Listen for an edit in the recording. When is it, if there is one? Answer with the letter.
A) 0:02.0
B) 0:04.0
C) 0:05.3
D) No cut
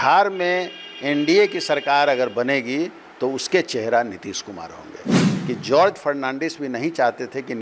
C